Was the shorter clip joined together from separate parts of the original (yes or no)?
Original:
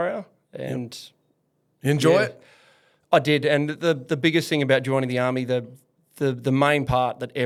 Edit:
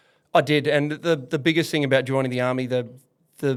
no